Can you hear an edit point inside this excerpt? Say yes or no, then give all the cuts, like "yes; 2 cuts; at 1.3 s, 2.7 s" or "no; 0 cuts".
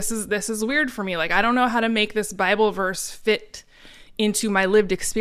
no; 0 cuts